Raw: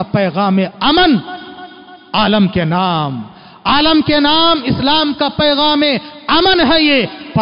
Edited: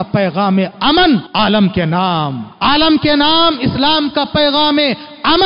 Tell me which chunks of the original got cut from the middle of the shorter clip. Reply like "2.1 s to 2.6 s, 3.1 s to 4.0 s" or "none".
1.3 s to 2.1 s, 3.2 s to 3.5 s